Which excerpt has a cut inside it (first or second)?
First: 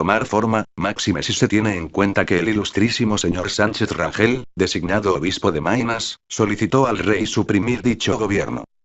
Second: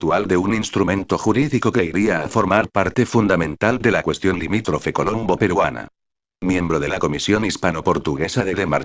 first